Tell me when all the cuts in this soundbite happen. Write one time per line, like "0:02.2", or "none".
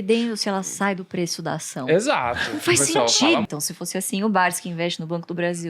0:03.4